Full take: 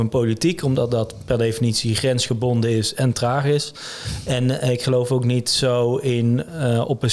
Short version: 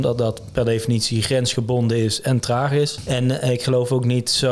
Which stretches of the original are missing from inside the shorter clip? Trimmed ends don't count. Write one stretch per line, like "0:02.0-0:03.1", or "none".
0:03.7-0:04.2